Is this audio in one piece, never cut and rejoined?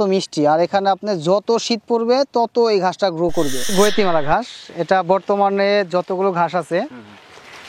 no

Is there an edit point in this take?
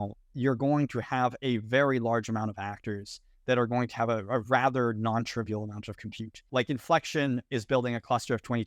yes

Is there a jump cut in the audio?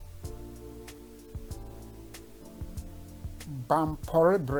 no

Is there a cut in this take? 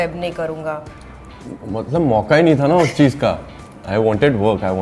no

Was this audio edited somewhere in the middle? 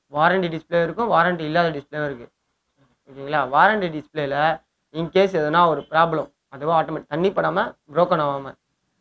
no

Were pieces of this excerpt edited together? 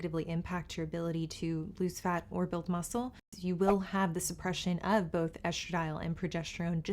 yes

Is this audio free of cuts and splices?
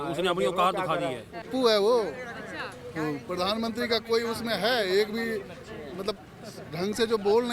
no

